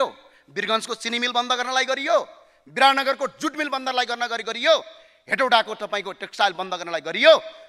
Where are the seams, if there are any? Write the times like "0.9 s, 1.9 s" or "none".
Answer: none